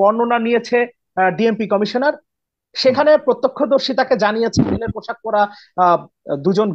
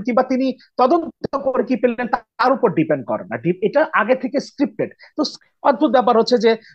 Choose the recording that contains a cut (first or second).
second